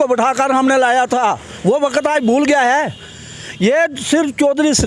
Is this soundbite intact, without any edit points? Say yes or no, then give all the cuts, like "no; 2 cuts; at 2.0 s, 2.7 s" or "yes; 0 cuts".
yes; 0 cuts